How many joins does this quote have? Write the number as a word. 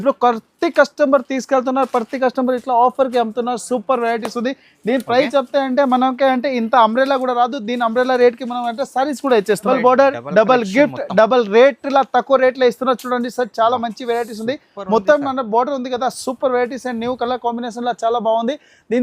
one